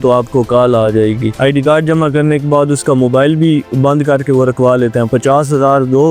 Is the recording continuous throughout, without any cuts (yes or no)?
no